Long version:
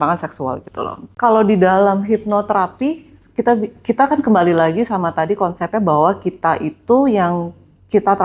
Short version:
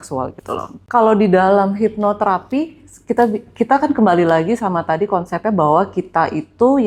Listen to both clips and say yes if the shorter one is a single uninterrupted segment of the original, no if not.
yes